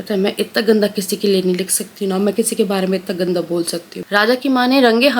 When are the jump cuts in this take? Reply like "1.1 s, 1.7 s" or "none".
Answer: 3.9 s